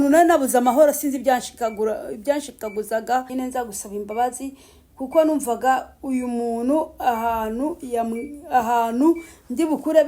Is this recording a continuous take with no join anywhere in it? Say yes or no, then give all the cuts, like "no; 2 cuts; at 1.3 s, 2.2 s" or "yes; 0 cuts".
no; 1 cut; at 3.3 s